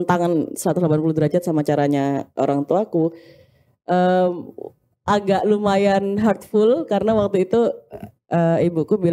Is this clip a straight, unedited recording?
yes; 0 cuts

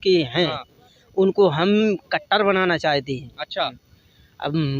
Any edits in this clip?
yes; 1 cut; at 3.9 s

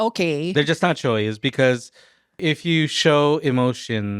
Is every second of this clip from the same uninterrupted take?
no; 1 cut; at 2.4 s

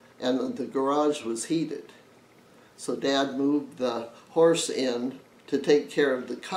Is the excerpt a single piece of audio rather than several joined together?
yes; 0 cuts

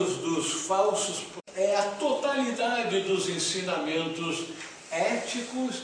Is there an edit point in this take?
no; 0 cuts

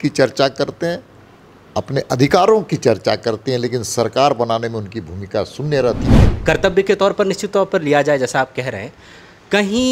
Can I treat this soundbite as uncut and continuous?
no; 1 cut; at 6.1 s

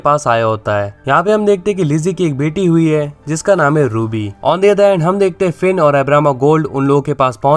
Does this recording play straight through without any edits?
no; 1 cut; at 0.9 s

